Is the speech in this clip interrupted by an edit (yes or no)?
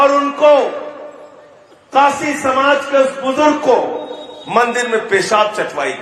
no